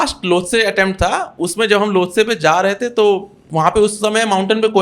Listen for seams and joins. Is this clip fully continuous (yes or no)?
no